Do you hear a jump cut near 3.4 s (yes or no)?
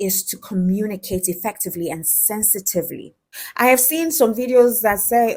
yes